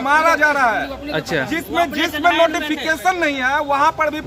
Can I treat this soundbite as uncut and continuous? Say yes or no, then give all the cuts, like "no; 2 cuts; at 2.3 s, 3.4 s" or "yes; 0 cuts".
yes; 0 cuts